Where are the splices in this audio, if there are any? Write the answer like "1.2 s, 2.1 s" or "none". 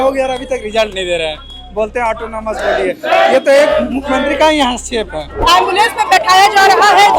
5.2 s